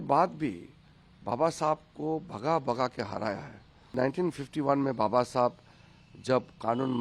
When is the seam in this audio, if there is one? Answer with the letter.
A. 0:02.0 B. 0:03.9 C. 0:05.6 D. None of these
B